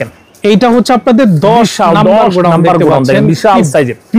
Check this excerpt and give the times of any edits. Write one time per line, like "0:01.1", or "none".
none